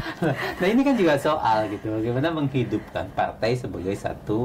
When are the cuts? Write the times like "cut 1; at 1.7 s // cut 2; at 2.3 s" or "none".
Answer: none